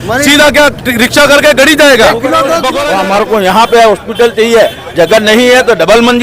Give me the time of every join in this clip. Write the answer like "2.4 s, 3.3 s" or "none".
2.7 s